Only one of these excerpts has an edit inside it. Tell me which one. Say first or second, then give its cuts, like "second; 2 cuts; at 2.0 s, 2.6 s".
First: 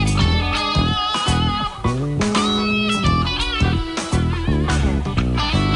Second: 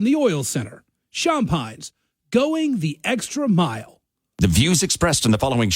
second; 1 cut; at 4.2 s